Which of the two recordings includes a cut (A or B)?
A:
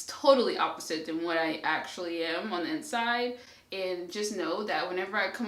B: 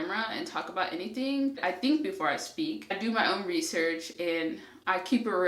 B